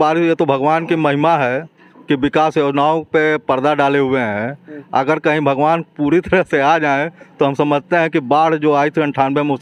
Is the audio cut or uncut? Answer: uncut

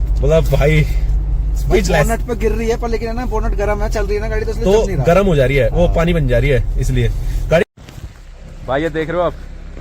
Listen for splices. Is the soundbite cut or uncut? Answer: cut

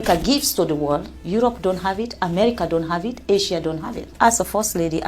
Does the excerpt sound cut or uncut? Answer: cut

